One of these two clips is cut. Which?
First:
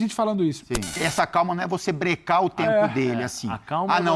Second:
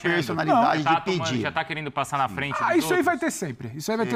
first; 1 cut; at 1.0 s

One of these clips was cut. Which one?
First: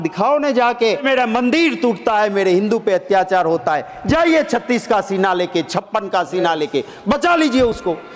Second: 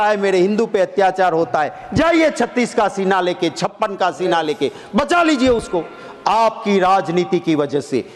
first; 1 cut; at 1.0 s

